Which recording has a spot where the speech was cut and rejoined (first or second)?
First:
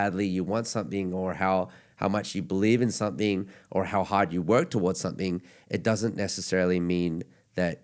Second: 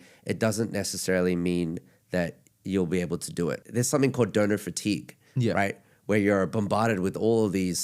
second